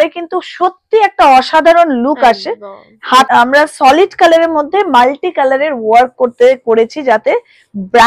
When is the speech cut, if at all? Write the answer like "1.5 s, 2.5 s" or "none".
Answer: 3.3 s